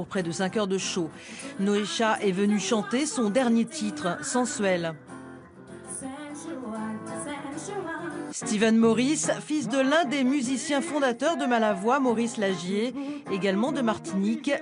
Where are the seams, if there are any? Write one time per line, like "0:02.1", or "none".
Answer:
none

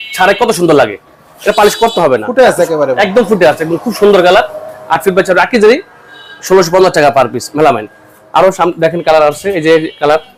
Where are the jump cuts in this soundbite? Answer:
none

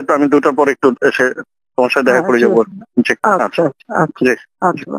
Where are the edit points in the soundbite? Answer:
none

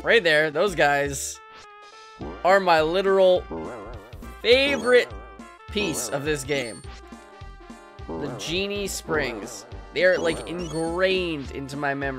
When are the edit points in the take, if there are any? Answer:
none

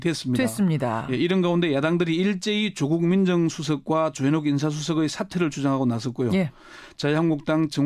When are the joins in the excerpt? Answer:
0:03.1

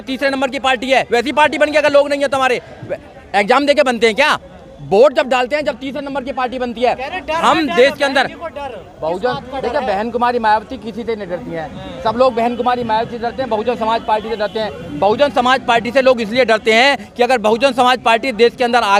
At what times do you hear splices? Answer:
none

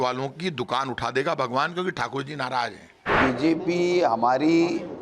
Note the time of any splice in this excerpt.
0:03.2

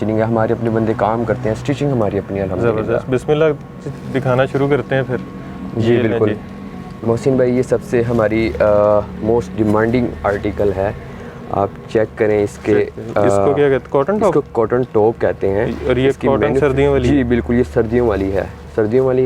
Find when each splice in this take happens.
none

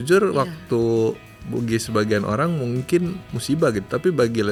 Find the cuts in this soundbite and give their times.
none

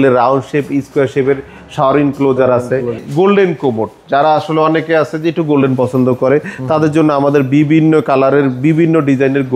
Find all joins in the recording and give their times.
0:03.1

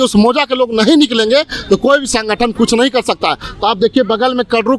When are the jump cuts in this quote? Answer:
none

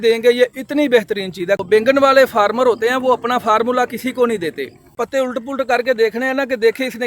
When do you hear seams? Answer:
0:01.6
0:05.0

